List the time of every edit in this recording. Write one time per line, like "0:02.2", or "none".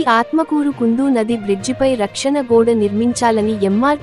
none